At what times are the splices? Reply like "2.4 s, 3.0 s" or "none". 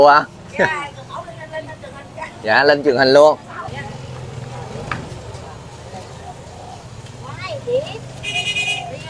3.7 s